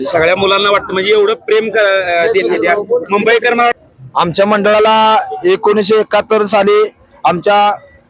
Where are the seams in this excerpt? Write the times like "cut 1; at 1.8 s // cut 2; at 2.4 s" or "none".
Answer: cut 1; at 3.8 s